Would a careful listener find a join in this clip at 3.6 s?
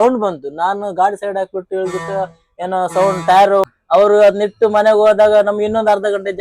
yes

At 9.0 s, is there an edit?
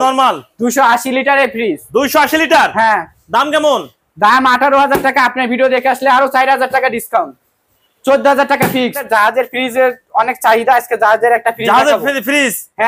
yes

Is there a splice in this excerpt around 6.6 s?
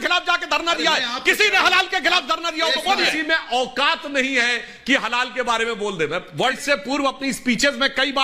yes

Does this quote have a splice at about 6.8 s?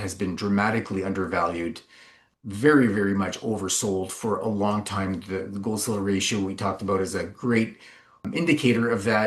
no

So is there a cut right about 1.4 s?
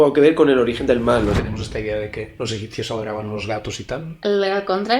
yes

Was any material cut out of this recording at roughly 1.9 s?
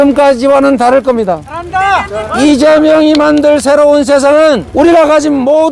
yes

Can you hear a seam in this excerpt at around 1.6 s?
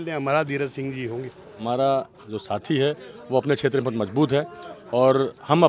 yes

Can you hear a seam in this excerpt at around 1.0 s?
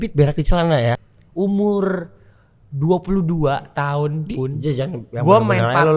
yes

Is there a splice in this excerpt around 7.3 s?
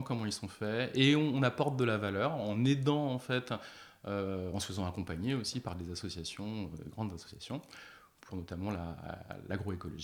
no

